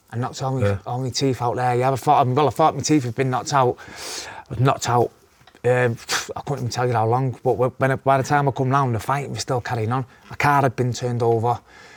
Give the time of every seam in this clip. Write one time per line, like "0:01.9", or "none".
none